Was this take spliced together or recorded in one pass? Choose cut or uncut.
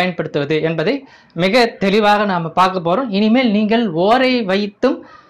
uncut